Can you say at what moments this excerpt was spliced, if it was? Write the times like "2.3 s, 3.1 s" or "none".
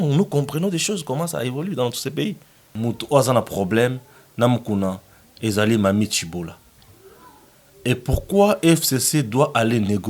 2.7 s